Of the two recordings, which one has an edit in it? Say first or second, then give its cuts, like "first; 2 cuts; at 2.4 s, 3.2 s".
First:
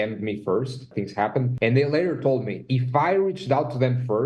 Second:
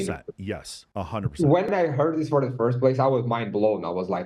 first; 1 cut; at 1.1 s